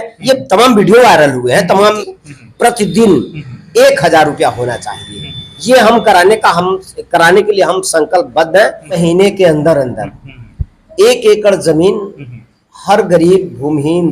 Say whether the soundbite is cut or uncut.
cut